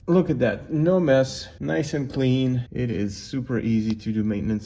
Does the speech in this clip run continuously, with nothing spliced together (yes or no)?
no